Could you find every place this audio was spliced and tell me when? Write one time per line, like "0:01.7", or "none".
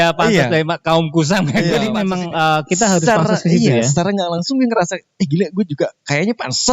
0:02.0